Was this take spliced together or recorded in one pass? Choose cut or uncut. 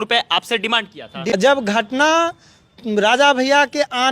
cut